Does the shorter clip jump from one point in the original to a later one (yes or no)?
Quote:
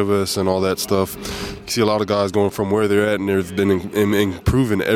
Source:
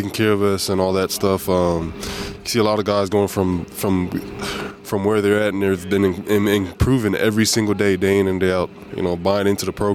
yes